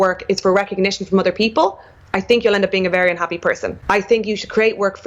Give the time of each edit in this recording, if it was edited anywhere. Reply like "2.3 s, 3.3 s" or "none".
3.7 s